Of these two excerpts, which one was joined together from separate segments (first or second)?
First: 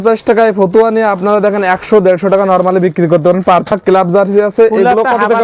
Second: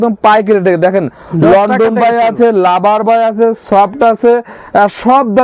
first